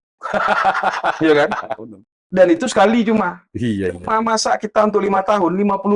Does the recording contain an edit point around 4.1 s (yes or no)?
no